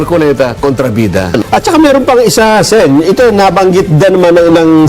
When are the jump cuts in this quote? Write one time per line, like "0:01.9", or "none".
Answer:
0:01.3